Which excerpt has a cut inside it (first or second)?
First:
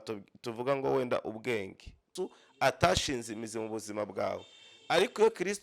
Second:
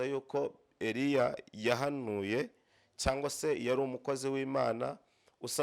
first